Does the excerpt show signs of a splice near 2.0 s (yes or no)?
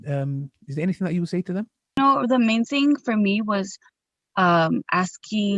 yes